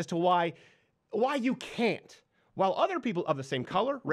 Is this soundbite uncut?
yes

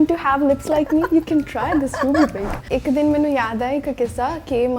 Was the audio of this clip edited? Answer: yes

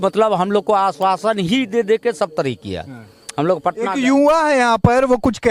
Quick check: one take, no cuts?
yes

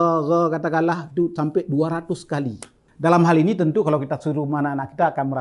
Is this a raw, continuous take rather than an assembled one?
no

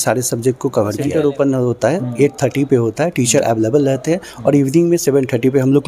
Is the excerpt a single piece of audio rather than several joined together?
no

